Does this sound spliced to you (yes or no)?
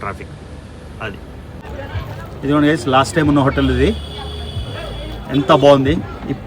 yes